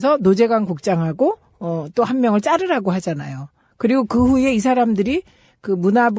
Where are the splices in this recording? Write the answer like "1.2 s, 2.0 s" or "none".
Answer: 3.5 s